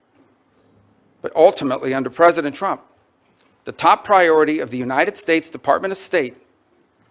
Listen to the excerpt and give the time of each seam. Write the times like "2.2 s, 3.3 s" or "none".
none